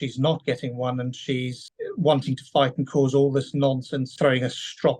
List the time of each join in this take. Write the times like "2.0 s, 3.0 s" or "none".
1.6 s, 4.1 s